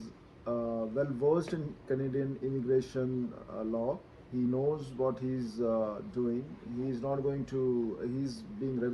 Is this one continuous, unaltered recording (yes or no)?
yes